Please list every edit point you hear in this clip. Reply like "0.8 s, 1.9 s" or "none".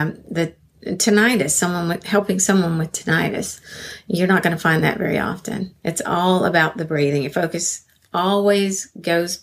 5.7 s